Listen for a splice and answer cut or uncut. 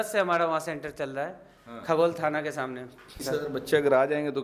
cut